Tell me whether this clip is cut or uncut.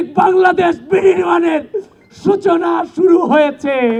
uncut